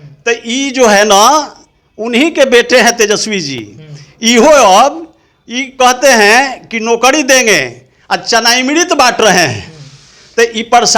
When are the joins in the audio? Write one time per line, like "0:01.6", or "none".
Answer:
none